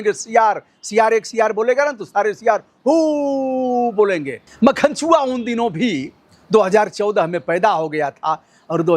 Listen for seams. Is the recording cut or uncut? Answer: cut